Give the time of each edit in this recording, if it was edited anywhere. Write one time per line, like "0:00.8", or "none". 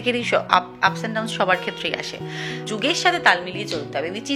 0:02.7